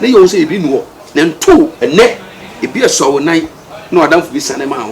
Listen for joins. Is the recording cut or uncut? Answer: cut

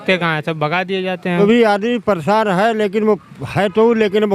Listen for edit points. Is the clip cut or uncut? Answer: cut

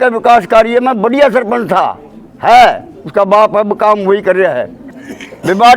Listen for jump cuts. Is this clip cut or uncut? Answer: cut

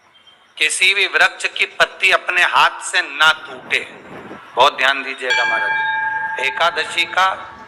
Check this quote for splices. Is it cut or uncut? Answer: cut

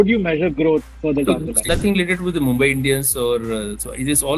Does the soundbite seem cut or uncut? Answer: cut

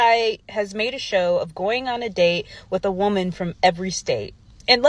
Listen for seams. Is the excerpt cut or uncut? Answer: uncut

